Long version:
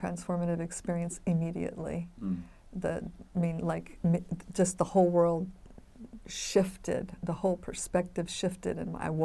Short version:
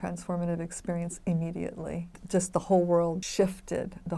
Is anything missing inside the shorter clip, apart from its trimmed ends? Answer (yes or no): yes